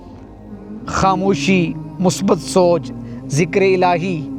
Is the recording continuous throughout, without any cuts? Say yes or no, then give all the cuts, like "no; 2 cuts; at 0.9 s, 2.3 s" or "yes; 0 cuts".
no; 1 cut; at 0.9 s